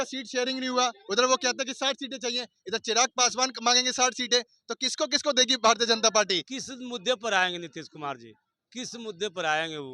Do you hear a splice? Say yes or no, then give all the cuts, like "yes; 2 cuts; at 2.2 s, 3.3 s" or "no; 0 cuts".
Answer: yes; 1 cut; at 6.5 s